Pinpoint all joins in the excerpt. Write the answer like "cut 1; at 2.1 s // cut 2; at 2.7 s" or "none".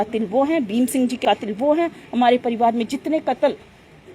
cut 1; at 1.2 s